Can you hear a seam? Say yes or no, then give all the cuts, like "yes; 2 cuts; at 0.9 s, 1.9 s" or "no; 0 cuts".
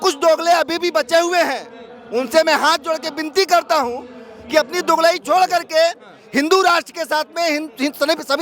no; 0 cuts